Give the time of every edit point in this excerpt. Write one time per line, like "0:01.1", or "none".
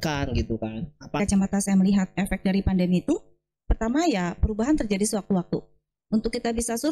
0:01.2